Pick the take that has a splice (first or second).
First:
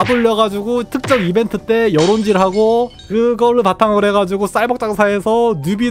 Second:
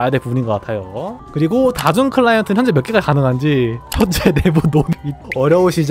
second